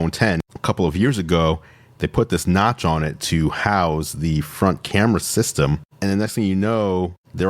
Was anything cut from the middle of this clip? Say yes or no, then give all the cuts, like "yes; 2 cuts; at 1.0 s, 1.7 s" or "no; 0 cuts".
yes; 1 cut; at 5.9 s